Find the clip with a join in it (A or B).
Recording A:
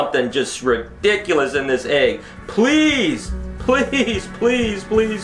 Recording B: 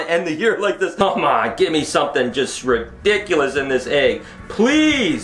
B